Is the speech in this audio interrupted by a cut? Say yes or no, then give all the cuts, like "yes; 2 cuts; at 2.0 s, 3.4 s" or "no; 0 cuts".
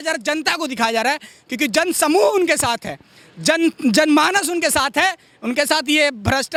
no; 0 cuts